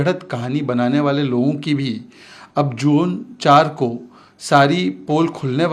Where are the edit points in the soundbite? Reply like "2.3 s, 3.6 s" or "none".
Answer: none